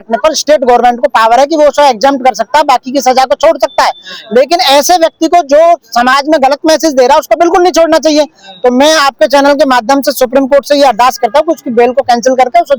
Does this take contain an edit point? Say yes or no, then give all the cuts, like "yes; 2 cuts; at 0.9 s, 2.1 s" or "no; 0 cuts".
no; 0 cuts